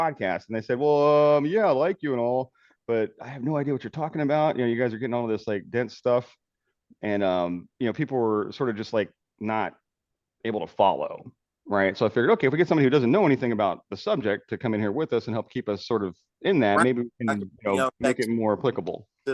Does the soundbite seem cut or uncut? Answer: uncut